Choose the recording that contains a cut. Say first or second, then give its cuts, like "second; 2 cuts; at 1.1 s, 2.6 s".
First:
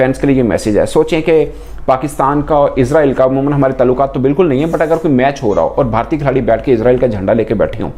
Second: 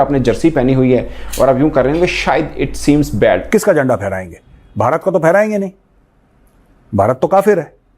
second; 1 cut; at 3.4 s